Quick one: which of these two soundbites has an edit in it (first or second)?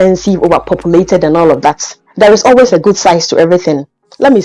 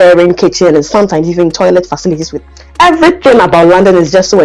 second